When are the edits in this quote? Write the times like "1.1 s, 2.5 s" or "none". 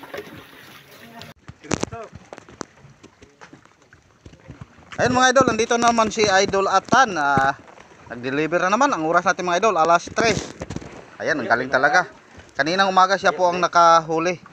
1.3 s